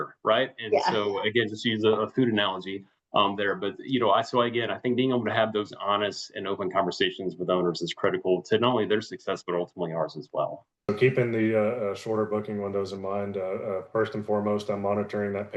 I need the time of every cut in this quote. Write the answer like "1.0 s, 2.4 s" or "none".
10.9 s